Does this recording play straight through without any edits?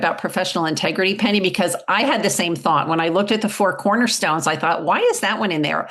yes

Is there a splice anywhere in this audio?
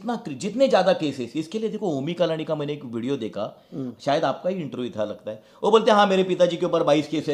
no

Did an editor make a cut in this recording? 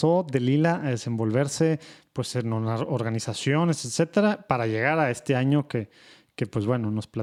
no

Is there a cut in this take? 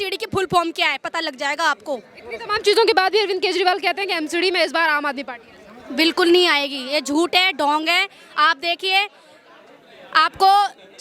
no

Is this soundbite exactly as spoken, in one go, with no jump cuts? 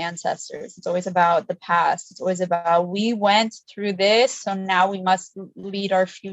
yes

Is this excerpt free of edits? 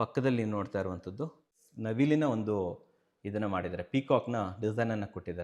yes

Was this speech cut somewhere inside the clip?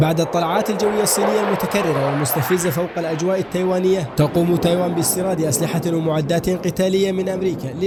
no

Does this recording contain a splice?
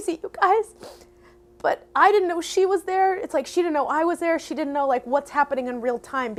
no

